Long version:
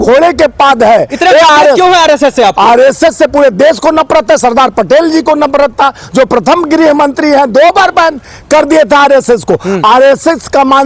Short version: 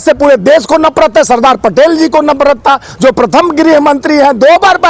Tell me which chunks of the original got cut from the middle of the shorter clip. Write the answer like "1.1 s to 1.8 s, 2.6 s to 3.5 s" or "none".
none